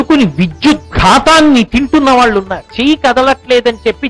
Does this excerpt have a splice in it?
yes; 1 cut; at 2.7 s

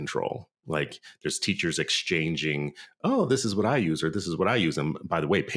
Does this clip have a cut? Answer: no; 0 cuts

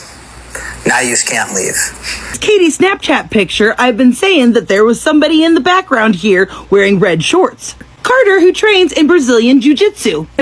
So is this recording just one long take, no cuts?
no; 2 cuts; at 2.4 s, 7.8 s

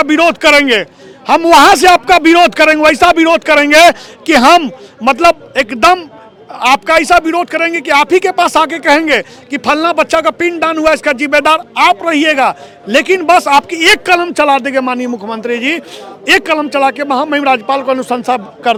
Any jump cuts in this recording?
no; 0 cuts

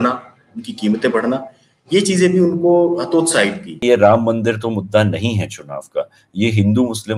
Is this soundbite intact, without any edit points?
no; 1 cut; at 3.8 s

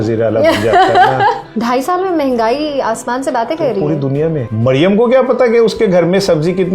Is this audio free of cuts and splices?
no; 2 cuts; at 1.5 s, 4.5 s

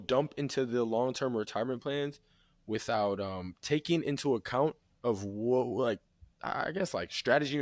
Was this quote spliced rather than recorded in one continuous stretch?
no; 0 cuts

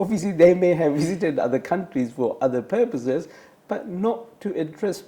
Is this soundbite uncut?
yes; 0 cuts

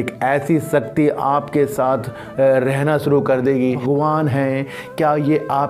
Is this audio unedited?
no; 1 cut; at 3.8 s

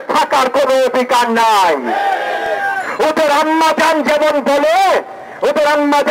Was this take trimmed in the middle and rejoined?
no; 0 cuts

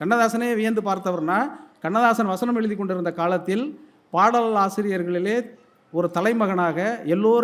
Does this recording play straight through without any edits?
yes; 0 cuts

